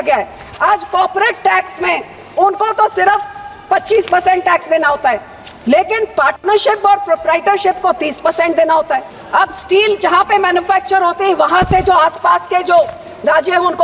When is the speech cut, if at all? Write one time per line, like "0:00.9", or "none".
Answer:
0:09.2